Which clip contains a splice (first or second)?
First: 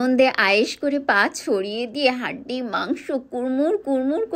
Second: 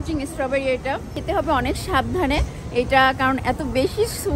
second